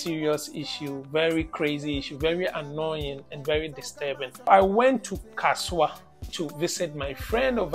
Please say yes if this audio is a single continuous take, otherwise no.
no